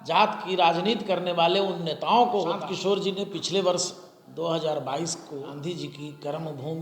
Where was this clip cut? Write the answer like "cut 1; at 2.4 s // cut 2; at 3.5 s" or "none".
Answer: cut 1; at 2.6 s // cut 2; at 5.5 s